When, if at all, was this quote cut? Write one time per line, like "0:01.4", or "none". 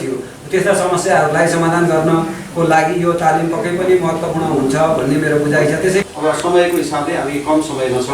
0:06.0